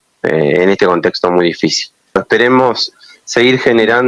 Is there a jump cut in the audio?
yes; 1 cut; at 2.2 s

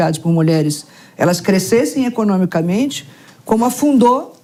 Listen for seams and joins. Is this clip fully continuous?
yes; 0 cuts

